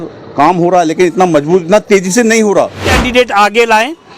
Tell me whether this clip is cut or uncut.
cut